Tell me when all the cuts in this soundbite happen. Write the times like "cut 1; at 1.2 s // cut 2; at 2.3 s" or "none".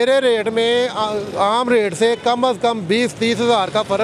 none